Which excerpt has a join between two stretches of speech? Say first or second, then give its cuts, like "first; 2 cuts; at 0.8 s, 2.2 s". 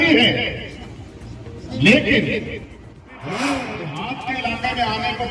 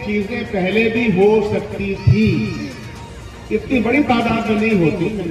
first; 1 cut; at 4.1 s